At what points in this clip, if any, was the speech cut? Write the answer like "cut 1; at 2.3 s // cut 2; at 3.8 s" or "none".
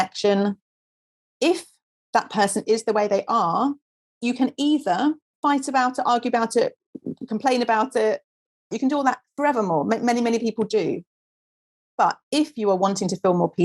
cut 1; at 4.2 s // cut 2; at 5.4 s // cut 3; at 8.7 s